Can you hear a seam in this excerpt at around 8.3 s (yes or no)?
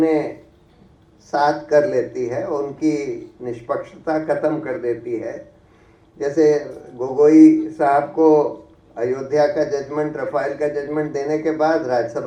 no